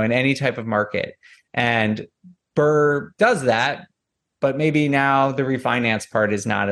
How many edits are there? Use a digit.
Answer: 1